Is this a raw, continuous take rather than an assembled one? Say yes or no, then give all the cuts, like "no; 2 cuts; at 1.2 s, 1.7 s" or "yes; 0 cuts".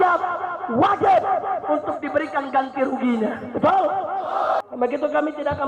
no; 1 cut; at 4.7 s